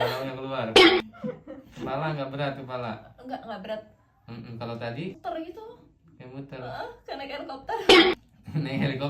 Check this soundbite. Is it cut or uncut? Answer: cut